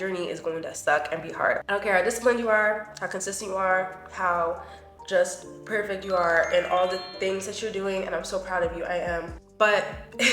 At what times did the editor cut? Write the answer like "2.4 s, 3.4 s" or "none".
9.4 s

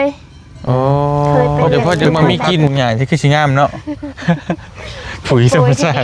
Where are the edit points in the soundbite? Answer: 2.7 s

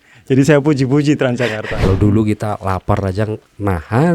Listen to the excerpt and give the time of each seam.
1.7 s

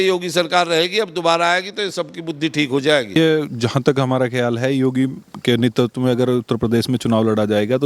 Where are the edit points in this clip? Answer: 3.2 s

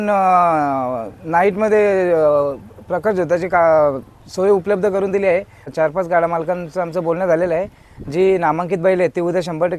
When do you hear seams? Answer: 5.7 s

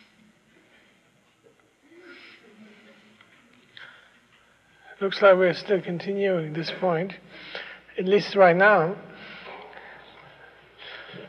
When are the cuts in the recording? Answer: none

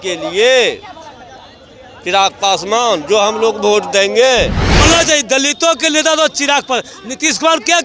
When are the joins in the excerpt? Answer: 4.8 s

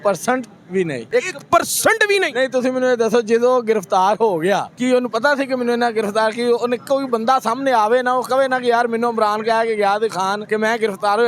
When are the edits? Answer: 1.0 s, 4.7 s, 10.4 s

